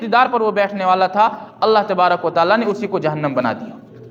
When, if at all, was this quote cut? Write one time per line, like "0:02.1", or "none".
none

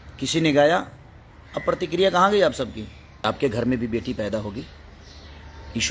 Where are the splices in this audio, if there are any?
0:03.2

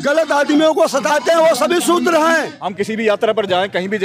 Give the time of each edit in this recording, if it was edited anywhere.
0:02.6

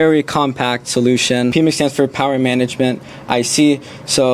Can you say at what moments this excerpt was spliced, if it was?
0:01.5

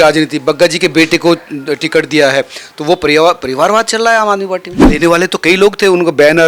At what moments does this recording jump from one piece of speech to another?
0:04.9

